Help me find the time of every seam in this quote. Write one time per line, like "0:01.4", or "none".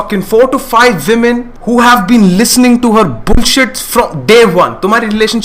0:01.5

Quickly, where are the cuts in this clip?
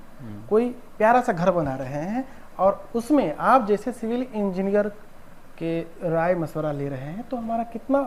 none

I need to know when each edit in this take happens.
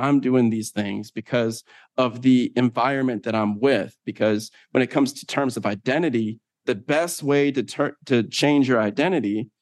none

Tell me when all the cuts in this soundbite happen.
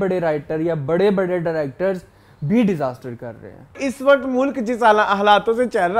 0:03.8

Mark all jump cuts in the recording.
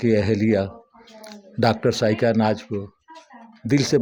none

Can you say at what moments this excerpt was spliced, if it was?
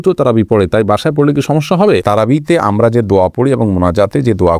0:02.0

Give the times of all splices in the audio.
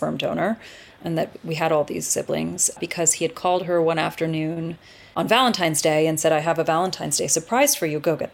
0:01.0
0:02.8
0:05.1

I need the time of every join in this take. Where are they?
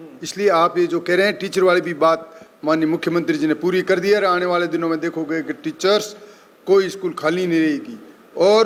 none

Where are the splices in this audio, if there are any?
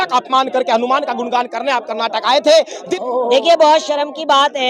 0:02.8

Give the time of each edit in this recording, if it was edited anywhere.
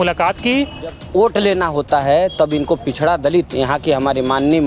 0:01.0

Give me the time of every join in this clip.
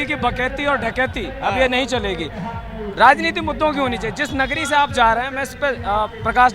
none

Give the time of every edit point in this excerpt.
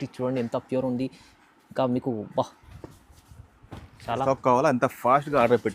0:04.2

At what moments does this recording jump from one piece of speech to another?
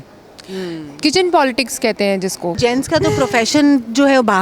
0:02.6

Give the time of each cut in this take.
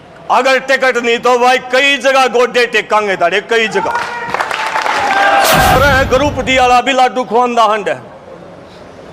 0:05.8

